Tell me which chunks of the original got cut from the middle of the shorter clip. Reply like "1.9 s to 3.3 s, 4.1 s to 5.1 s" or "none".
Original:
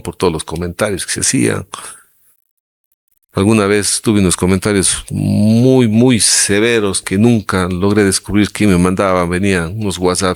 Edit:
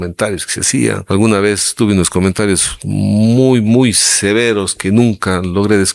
1.6 s to 3.3 s